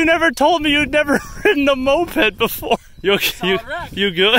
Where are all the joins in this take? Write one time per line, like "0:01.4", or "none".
0:02.9